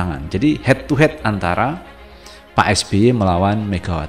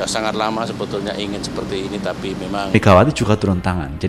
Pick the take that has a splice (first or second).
second